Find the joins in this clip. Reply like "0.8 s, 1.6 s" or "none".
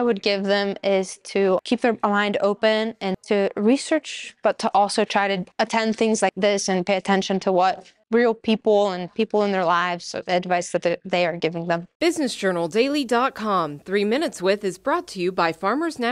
1.6 s, 3.2 s, 5.5 s, 6.4 s, 8.0 s, 11.9 s